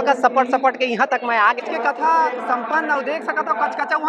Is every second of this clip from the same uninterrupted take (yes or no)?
no